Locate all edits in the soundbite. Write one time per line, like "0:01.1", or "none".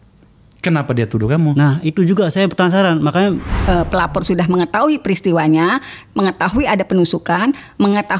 0:03.5